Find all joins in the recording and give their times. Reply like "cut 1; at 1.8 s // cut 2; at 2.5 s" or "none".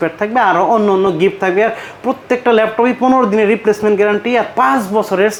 none